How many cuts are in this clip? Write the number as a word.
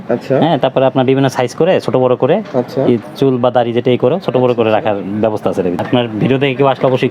one